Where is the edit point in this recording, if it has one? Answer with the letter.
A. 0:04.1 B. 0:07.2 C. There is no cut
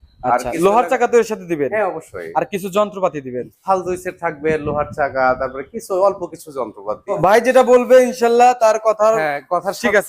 B